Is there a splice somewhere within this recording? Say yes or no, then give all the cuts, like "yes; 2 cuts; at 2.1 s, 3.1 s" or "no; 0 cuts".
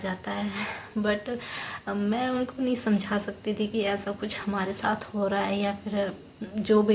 no; 0 cuts